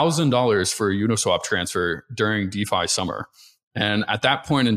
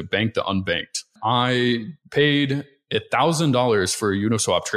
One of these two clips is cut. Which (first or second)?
second